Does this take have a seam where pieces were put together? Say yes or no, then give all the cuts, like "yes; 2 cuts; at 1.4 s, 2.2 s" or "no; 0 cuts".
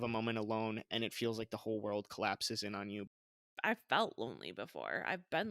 yes; 1 cut; at 3.3 s